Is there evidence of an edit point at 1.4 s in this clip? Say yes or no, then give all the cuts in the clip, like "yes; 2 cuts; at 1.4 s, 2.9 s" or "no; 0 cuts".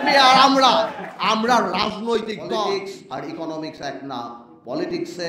no; 1 cut; at 2.6 s